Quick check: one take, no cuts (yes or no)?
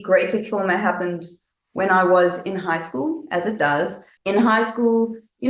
no